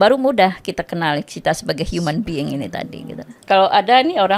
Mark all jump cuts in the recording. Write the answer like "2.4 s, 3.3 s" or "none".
3.3 s